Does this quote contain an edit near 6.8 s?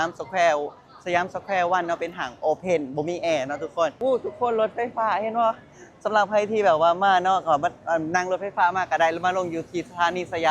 no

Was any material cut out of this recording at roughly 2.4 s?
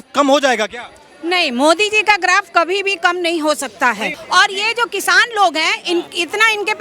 no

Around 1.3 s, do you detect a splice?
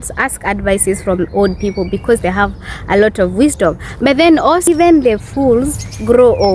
no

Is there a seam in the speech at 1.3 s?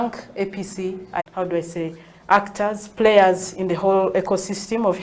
yes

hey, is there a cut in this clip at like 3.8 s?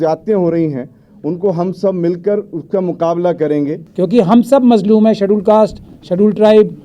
yes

